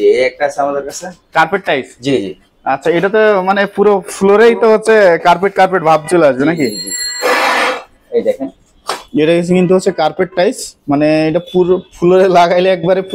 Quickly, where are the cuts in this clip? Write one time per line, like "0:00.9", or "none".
none